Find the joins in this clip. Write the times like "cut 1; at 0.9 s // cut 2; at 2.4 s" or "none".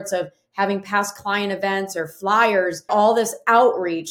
cut 1; at 2.9 s